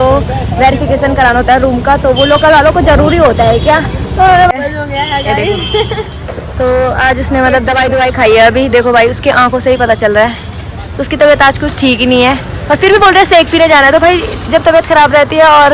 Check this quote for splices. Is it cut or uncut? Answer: cut